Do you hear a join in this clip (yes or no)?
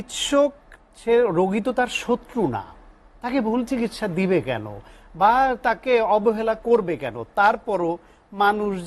no